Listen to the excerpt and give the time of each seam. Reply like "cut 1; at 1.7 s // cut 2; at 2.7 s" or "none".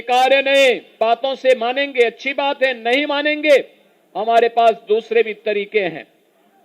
cut 1; at 1.0 s